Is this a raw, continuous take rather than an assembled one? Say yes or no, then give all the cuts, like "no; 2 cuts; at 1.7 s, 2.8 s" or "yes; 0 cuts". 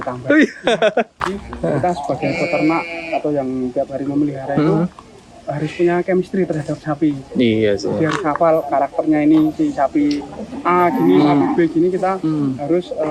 no; 1 cut; at 1.2 s